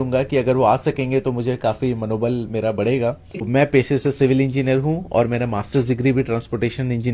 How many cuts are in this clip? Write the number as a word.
one